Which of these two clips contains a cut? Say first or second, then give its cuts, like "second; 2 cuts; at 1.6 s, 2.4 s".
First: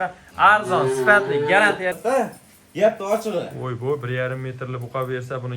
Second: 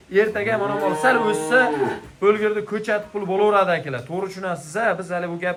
first; 1 cut; at 2.0 s